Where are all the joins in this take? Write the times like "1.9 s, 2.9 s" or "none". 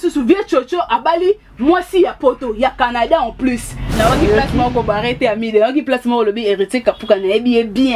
3.8 s